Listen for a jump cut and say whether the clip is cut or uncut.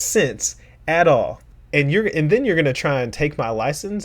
cut